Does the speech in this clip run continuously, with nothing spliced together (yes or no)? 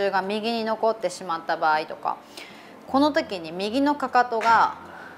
yes